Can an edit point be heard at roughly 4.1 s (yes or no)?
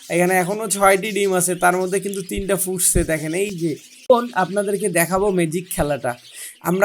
yes